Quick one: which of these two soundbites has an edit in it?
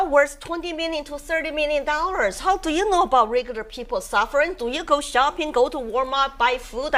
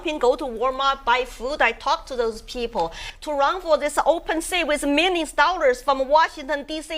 second; 1 cut; at 3.0 s

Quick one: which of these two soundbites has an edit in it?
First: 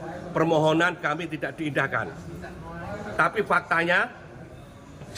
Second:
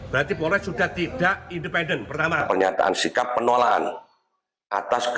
second; 1 cut; at 2.4 s

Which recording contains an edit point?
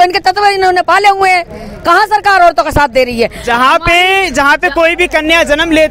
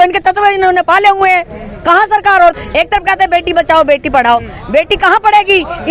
second; 1 cut; at 2.5 s

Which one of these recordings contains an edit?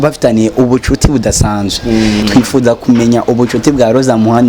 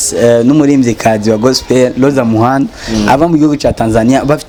first; 1 cut; at 2.2 s

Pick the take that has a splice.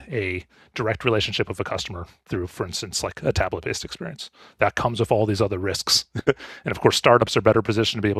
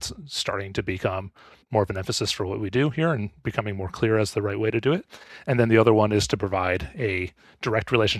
second; 1 cut; at 1.6 s

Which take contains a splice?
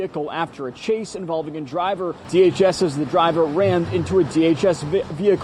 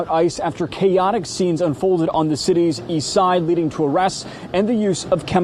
first; 1 cut; at 2.2 s

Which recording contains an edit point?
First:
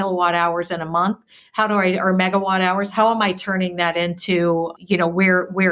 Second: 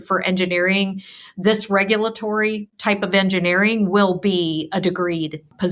first; 1 cut; at 4.7 s

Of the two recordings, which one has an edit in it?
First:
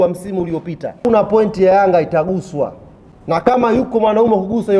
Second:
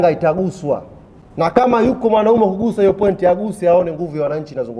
first; 1 cut; at 1.0 s

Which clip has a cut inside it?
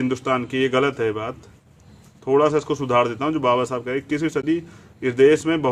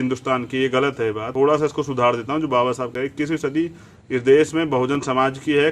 second; 1 cut; at 1.2 s

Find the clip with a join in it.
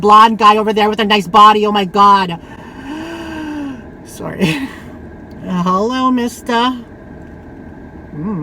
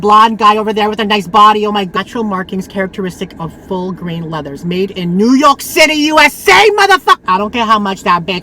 second; 2 cuts; at 1.9 s, 7.2 s

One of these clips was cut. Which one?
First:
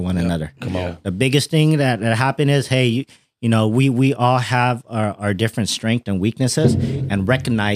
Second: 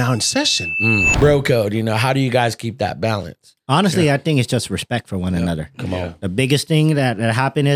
second; 1 cut; at 1.1 s

